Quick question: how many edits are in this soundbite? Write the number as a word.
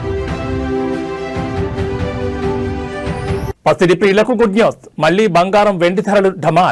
one